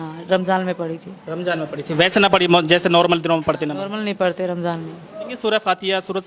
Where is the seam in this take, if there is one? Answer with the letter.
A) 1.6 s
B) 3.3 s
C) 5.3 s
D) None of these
C